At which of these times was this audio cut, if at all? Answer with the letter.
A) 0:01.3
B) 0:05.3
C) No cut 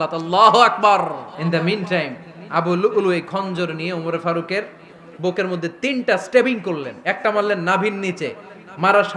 A